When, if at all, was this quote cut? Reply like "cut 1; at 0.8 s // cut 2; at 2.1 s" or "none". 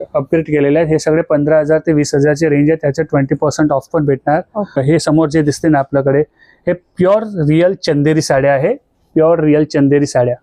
cut 1; at 4.8 s

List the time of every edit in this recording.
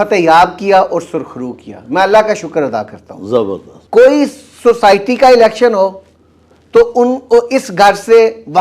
cut 1; at 3.7 s

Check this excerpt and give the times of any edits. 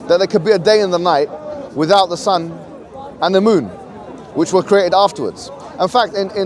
none

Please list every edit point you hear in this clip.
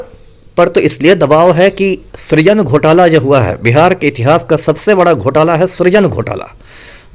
none

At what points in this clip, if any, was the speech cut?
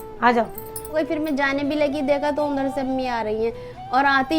cut 1; at 0.9 s

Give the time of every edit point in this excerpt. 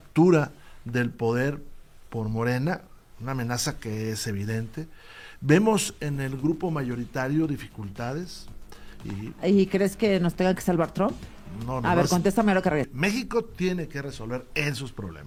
none

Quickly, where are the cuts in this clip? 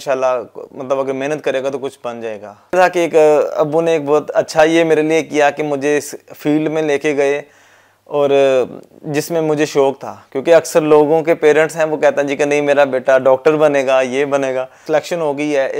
cut 1; at 2.7 s // cut 2; at 14.8 s

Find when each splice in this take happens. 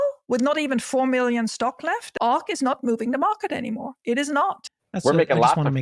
cut 1; at 2.1 s // cut 2; at 4.7 s

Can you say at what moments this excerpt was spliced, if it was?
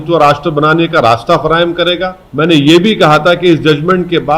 cut 1; at 2.2 s

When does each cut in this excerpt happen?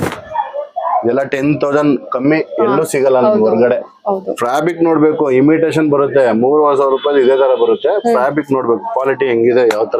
none

